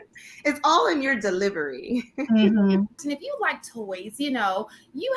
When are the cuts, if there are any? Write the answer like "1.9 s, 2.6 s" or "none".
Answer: 3.0 s